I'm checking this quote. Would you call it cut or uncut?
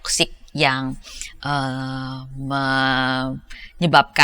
uncut